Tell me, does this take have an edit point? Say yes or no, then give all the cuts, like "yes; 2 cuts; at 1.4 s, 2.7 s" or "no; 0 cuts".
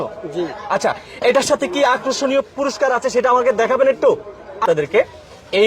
yes; 1 cut; at 4.6 s